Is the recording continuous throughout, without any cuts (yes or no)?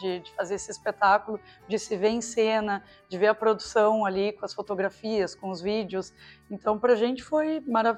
yes